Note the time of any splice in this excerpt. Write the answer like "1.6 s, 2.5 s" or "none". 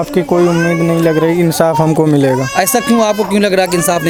none